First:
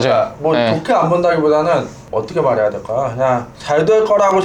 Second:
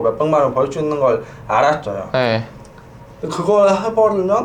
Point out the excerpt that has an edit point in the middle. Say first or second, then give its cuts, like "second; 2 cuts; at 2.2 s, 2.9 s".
first; 2 cuts; at 2.0 s, 3.5 s